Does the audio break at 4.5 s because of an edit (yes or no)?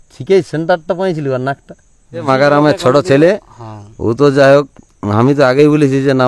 no